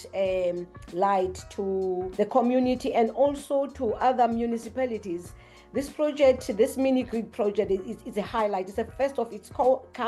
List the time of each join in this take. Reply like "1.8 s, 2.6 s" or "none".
2.1 s